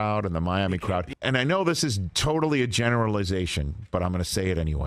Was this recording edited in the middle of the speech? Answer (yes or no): yes